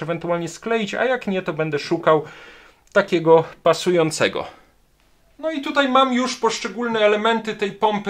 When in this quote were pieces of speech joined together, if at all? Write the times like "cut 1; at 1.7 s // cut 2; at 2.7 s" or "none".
none